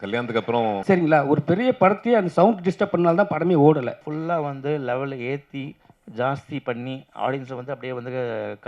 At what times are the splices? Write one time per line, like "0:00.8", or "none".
0:00.8
0:04.1